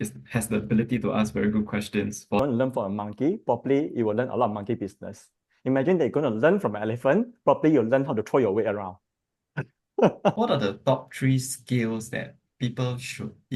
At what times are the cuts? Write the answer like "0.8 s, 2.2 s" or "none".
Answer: 2.4 s, 10.3 s